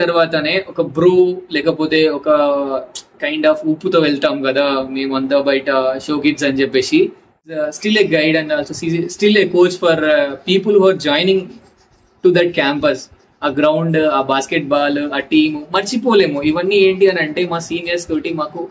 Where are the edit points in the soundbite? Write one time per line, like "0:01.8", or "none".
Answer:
0:07.6